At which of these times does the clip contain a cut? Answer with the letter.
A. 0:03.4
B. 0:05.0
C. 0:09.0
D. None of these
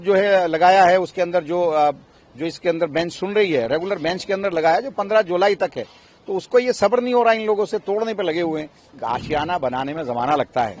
C